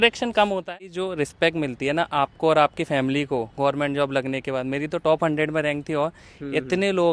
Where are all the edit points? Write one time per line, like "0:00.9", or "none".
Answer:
0:00.9